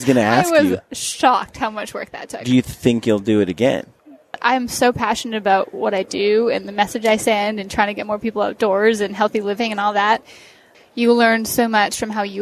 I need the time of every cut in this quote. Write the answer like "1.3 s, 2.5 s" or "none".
4.4 s, 10.7 s